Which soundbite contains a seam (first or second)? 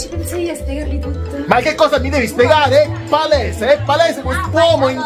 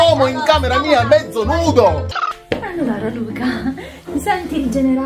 second